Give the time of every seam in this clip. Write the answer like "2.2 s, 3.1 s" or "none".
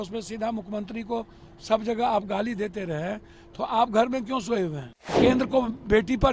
5.1 s